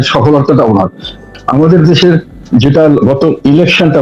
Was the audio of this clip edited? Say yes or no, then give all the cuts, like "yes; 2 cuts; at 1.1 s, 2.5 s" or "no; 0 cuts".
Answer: yes; 1 cut; at 1.3 s